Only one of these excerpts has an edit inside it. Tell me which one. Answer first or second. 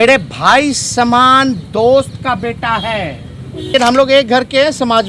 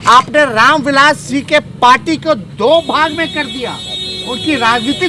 first